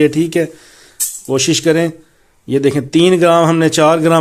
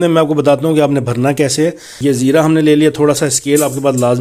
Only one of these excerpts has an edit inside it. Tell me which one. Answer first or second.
second